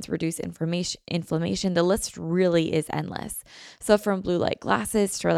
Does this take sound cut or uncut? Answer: uncut